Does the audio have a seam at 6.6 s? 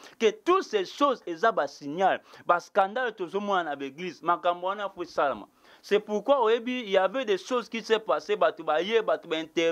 no; 0 cuts

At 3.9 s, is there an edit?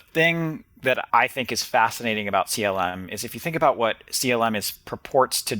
no; 1 cut; at 1.0 s

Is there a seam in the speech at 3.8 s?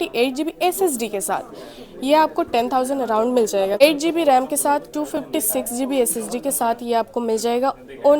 yes; 1 cut; at 3.8 s

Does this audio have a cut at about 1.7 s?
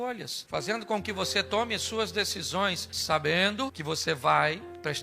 no; 2 cuts; at 2.9 s, 3.8 s

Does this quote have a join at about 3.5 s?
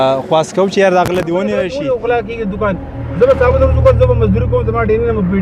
no; 1 cut; at 1.6 s

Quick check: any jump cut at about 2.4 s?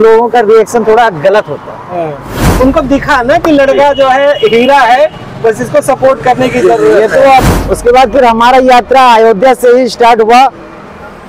yes; 2 cuts; at 2.4 s, 7.5 s

